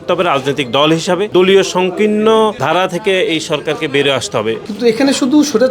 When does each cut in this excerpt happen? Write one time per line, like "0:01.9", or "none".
0:01.3
0:02.6
0:04.6